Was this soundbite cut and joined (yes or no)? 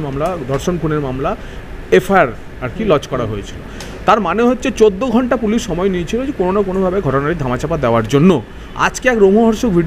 no